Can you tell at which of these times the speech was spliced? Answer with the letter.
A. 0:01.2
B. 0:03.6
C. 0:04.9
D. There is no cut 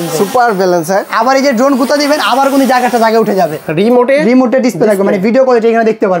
B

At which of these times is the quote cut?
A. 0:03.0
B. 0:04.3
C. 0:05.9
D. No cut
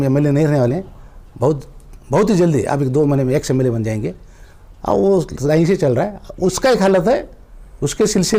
D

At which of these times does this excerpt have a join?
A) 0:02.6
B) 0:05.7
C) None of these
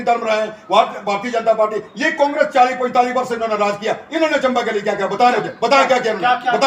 C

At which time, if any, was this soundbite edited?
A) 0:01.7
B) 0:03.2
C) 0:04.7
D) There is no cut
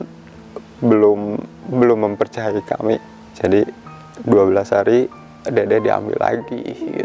B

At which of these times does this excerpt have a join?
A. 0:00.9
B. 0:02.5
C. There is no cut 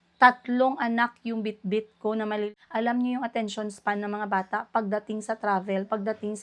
B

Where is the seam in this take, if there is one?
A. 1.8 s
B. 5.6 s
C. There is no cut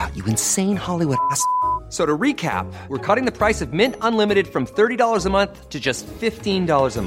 C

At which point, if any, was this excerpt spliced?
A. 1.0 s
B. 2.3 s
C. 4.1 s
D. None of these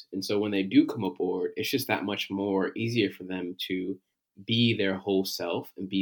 D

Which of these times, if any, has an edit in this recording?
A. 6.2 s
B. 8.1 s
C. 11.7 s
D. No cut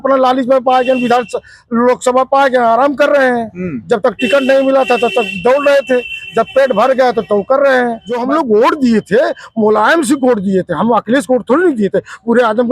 B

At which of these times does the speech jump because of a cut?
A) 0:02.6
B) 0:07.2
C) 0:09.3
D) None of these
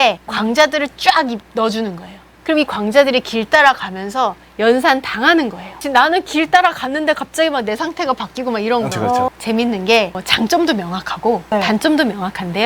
C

